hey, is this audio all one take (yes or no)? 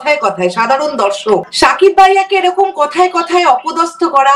no